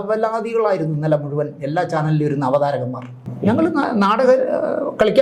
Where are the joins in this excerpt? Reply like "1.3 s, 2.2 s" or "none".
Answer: 3.2 s